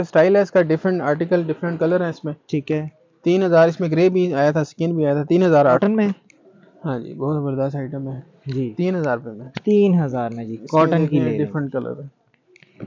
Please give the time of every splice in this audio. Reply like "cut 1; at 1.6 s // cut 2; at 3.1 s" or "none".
cut 1; at 5.8 s